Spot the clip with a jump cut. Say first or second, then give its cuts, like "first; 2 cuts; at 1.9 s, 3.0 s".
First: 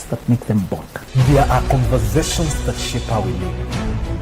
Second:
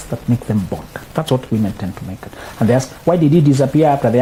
first; 1 cut; at 1.0 s